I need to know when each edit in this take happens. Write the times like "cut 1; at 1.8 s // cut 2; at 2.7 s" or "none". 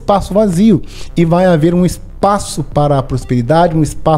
none